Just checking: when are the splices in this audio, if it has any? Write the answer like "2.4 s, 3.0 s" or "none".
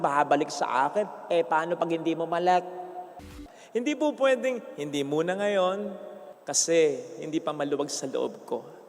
3.2 s